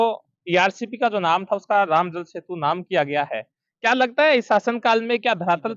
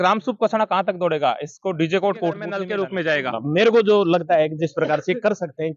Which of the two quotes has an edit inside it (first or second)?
second